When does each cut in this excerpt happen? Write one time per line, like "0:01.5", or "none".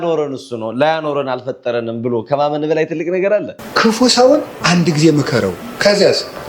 0:03.6

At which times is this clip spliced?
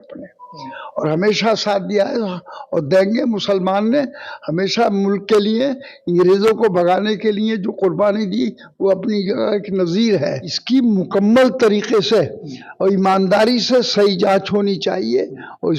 0:10.5

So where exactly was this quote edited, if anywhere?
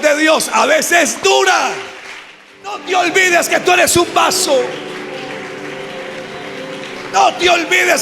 0:02.8

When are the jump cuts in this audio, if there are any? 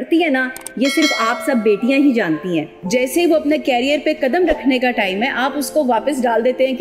0:02.8

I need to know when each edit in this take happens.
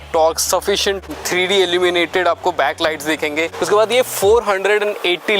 0:01.1
0:03.5

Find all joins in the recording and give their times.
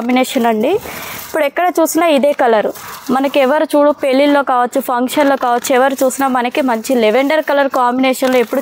none

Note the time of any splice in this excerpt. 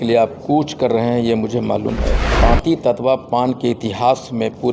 0:02.2

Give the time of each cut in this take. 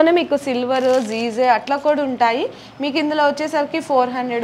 none

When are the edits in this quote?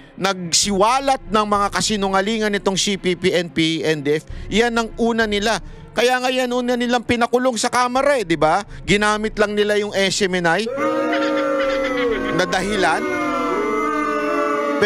none

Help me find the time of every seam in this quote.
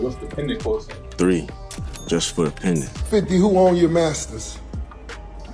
0:02.9

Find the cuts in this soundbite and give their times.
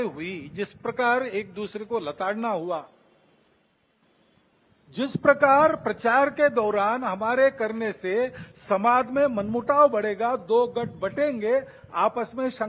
none

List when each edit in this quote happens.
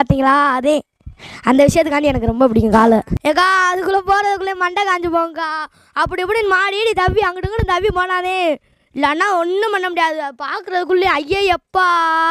0:03.1

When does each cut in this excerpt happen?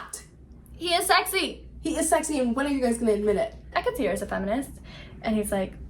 0:03.6

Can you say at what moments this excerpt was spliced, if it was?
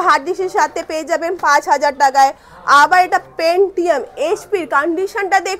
none

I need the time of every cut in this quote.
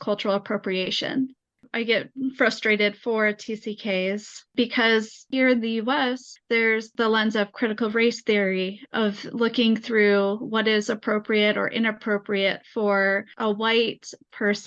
none

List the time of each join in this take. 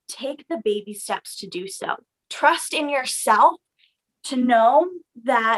0:02.2

